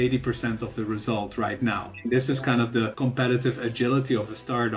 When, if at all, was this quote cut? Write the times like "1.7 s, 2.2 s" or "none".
2.0 s, 2.9 s